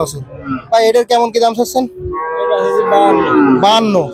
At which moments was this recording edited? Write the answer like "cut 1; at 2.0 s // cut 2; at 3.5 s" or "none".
none